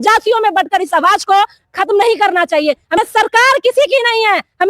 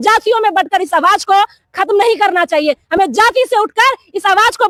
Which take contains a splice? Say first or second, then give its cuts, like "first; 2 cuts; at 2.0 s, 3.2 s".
first; 1 cut; at 3.0 s